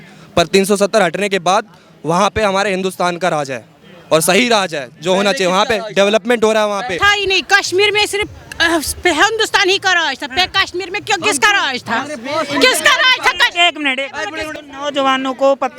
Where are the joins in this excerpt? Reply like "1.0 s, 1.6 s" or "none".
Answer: 7.0 s, 14.5 s